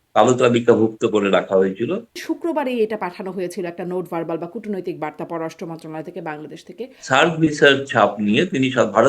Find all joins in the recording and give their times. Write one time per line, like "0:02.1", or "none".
0:02.3
0:06.9

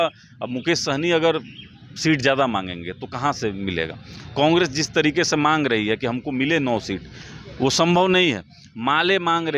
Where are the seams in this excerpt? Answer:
none

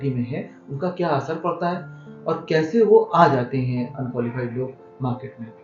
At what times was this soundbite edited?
none

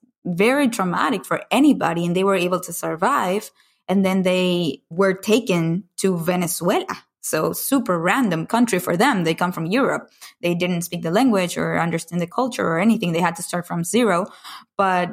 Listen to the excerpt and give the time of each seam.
0:04.8
0:12.3

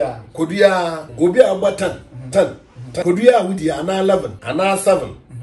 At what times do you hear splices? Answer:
0:01.0
0:03.0
0:04.4

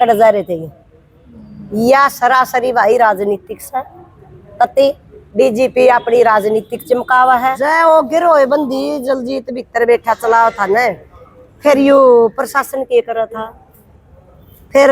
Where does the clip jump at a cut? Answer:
0:07.6

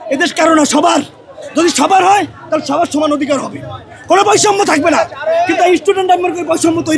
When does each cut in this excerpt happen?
none

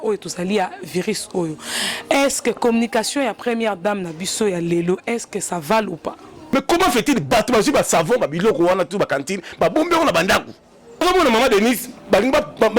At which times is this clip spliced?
0:06.4
0:11.0

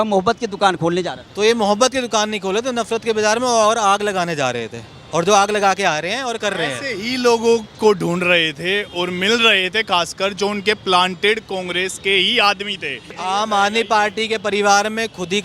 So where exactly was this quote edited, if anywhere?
0:13.1

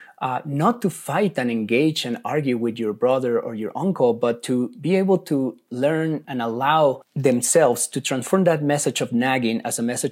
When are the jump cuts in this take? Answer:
0:07.1

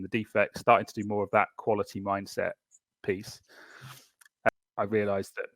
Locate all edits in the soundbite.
0:04.5

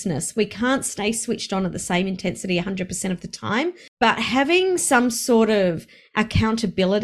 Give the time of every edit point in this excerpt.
0:03.8

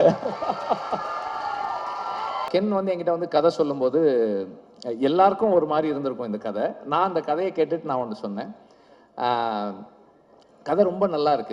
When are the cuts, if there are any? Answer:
0:02.5

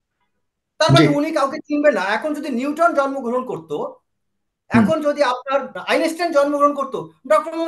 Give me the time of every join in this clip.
0:05.8

